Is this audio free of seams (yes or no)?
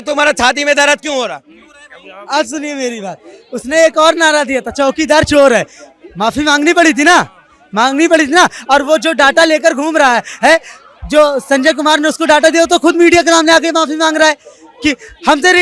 yes